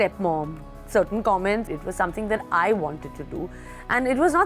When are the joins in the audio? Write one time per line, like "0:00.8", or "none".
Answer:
0:01.7

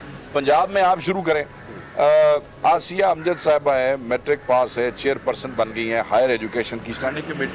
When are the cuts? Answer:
none

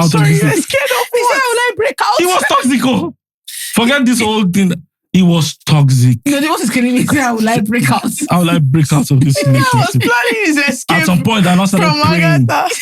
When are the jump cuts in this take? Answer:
none

